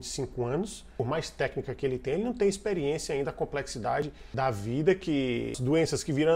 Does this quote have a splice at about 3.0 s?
no; 3 cuts; at 1.0 s, 4.3 s, 5.6 s

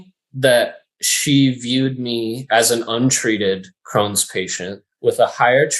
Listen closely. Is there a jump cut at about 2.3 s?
no; 1 cut; at 4.9 s

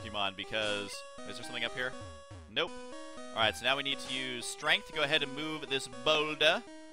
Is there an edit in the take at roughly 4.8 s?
yes; 1 cut; at 4.8 s

